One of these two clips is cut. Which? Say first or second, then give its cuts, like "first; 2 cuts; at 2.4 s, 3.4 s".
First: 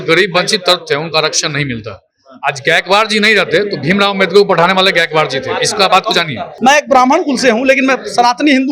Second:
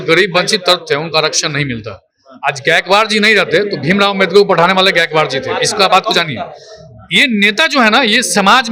first; 1 cut; at 6.5 s